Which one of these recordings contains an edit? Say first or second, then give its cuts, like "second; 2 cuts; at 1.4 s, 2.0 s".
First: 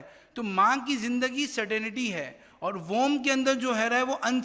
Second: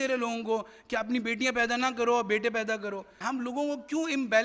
second; 1 cut; at 3.2 s